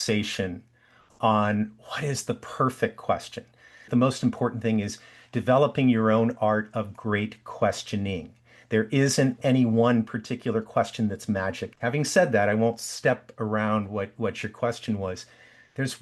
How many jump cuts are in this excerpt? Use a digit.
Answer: 2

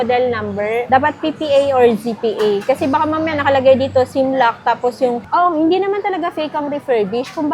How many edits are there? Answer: 1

